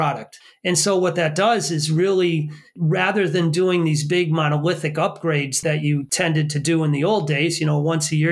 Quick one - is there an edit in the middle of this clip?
yes; 2 cuts; at 2.7 s, 5.9 s

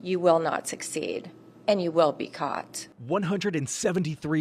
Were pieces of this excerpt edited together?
yes; 1 cut; at 2.7 s

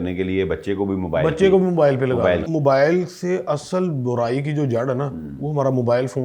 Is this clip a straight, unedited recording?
no; 1 cut; at 2.4 s

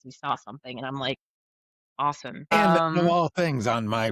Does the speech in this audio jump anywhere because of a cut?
yes; 1 cut; at 2.5 s

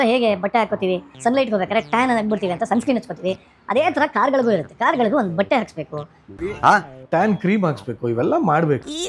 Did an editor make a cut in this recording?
yes; 2 cuts; at 1.1 s, 6.4 s

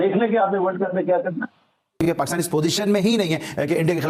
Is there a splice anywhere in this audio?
no; 0 cuts

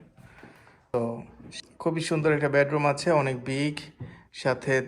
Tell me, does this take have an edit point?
yes; 1 cut; at 0.9 s

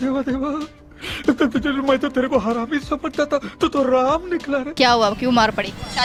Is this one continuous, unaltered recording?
yes; 0 cuts

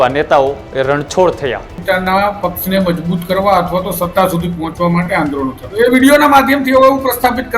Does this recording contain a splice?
yes; 2 cuts; at 1.7 s, 5.6 s

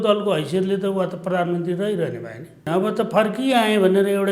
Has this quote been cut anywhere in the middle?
yes; 1 cut; at 2.7 s

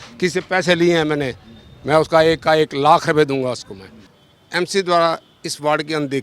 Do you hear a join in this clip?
yes; 1 cut; at 3.9 s

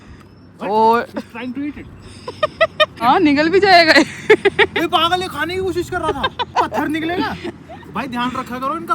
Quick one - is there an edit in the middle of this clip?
yes; 2 cuts; at 3.0 s, 6.5 s

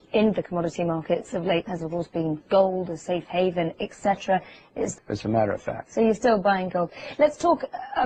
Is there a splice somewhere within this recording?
no; 0 cuts

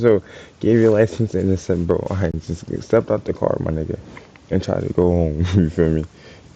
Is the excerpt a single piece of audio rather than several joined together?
yes; 0 cuts

